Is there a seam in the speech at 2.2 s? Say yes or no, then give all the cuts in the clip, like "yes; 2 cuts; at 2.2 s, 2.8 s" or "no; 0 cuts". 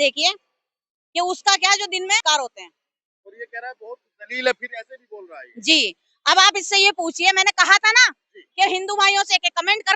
yes; 1 cut; at 2.2 s